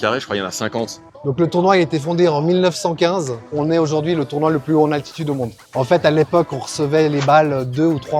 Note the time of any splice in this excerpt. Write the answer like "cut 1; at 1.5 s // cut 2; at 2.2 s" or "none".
cut 1; at 1.1 s // cut 2; at 3.5 s // cut 3; at 5.6 s